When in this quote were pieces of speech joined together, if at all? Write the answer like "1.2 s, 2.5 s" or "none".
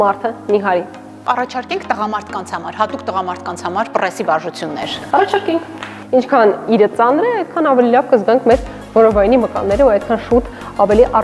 1.2 s, 5.9 s